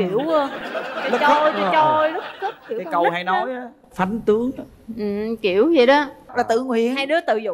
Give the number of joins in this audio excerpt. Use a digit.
1